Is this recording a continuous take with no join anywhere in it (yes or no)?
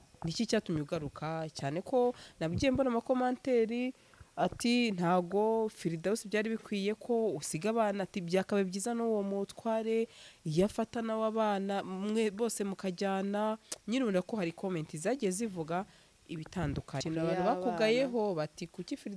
no